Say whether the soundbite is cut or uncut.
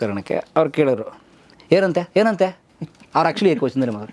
uncut